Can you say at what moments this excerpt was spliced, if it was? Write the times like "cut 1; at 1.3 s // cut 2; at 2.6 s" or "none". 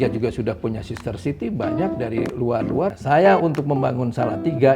cut 1; at 3.0 s

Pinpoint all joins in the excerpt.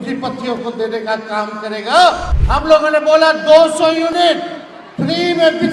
cut 1; at 2.3 s

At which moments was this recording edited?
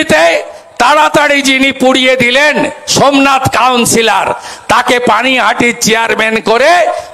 none

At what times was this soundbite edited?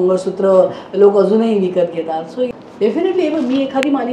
cut 1; at 2.5 s

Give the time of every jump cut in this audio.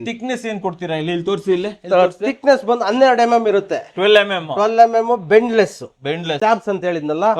cut 1; at 6.4 s

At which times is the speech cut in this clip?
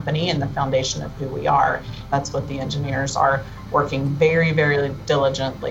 cut 1; at 2.0 s

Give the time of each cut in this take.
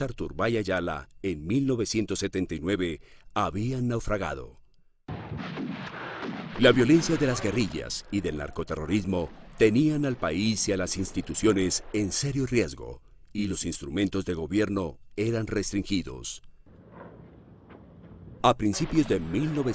cut 1; at 15.4 s

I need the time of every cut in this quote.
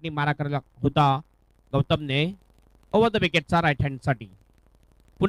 none

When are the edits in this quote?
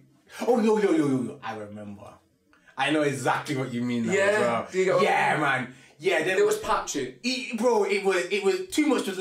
none

